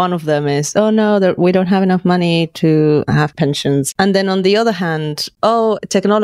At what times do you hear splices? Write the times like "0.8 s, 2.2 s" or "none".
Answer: 3.5 s, 5.2 s